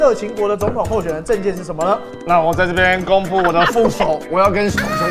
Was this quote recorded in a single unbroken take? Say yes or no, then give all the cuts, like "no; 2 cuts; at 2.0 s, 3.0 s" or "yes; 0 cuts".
yes; 0 cuts